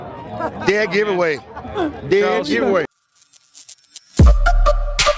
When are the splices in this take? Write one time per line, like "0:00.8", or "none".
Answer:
0:02.8